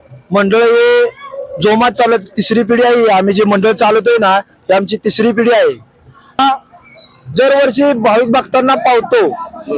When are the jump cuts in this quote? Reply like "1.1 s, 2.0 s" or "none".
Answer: 6.4 s